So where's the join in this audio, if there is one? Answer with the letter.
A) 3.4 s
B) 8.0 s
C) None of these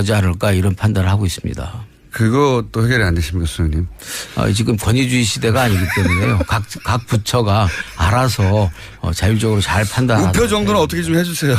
C